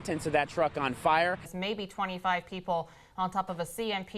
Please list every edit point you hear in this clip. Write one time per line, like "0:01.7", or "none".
0:01.5